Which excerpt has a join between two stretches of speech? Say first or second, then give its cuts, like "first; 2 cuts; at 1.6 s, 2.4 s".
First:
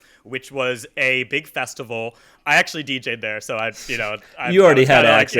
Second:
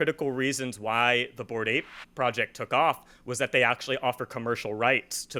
first; 1 cut; at 2.4 s